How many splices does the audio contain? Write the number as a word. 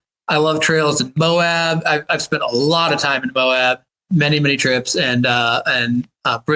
one